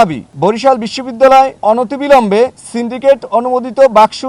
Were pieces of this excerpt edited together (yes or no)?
no